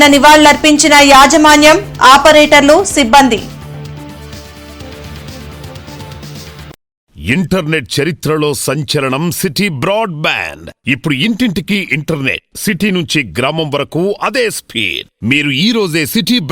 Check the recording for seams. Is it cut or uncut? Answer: cut